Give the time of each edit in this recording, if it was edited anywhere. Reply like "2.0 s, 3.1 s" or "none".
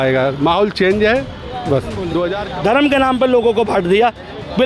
2.4 s